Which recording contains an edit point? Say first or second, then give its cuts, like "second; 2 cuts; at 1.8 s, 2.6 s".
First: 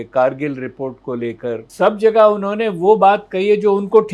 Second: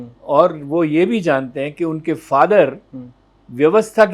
first; 1 cut; at 1.7 s